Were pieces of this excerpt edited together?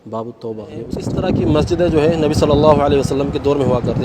yes; 1 cut; at 0.9 s

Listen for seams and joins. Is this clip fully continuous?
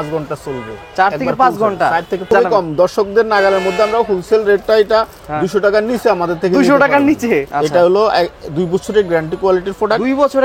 no; 2 cuts; at 2.2 s, 7.5 s

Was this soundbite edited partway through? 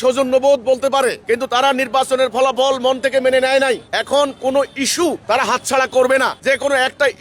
yes; 4 cuts; at 1.2 s, 3.9 s, 5.2 s, 6.4 s

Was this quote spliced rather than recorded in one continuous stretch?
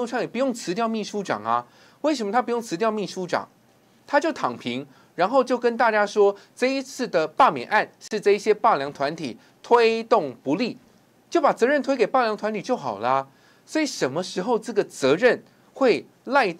no; 0 cuts

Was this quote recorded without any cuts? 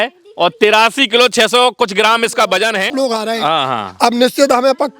no; 1 cut; at 2.9 s

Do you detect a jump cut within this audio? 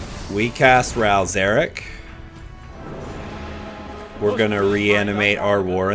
yes; 1 cut; at 2.8 s

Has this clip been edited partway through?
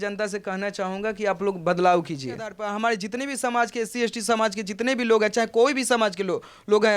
yes; 1 cut; at 2.6 s

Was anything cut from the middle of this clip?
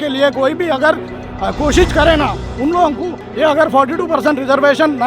yes; 1 cut; at 3.2 s

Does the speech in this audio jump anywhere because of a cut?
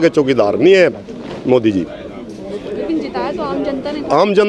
no; 0 cuts

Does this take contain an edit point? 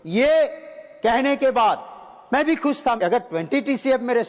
yes; 1 cut; at 3.0 s

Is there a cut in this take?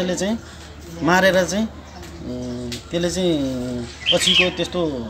no; 0 cuts

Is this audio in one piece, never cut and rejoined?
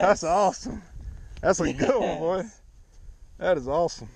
yes; 0 cuts

